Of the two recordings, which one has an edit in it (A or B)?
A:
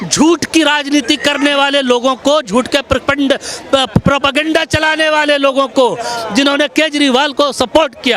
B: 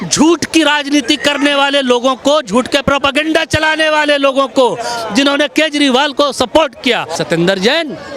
B